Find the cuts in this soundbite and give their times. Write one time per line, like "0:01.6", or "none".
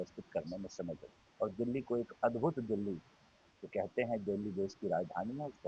0:01.2